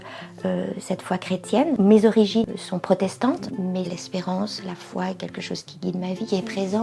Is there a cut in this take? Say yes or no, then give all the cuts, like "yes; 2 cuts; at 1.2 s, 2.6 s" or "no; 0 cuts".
yes; 2 cuts; at 2.4 s, 3.9 s